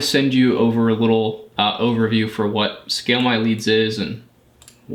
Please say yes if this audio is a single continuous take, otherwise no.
yes